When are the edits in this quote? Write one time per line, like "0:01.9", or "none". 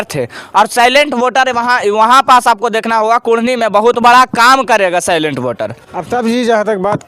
none